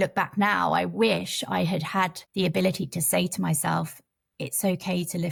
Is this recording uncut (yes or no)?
yes